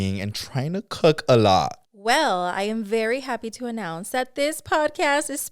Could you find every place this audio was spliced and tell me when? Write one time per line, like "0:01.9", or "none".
0:01.8